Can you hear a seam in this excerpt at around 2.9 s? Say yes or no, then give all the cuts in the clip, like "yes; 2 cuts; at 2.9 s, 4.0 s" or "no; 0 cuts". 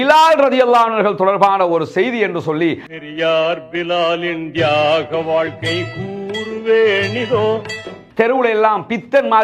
yes; 2 cuts; at 2.9 s, 7.9 s